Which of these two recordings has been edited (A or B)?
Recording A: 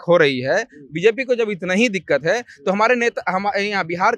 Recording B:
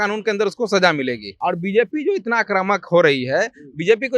B